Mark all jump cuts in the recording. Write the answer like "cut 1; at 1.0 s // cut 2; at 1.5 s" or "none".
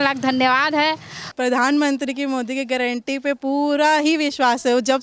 cut 1; at 1.2 s